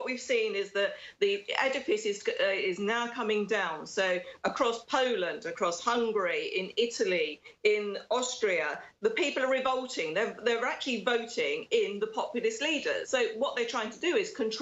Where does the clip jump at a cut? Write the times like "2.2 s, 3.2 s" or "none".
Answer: 13.0 s